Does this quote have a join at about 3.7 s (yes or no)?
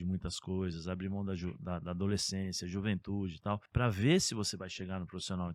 yes